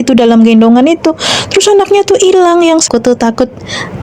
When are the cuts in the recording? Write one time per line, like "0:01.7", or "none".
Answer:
0:02.8